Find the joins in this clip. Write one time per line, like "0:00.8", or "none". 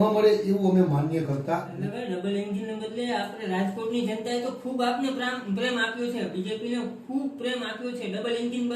0:01.7